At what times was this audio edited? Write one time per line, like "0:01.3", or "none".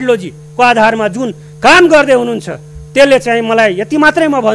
none